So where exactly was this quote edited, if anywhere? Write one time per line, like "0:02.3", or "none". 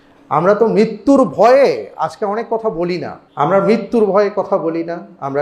0:03.2